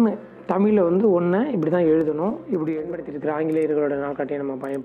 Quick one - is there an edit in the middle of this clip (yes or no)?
yes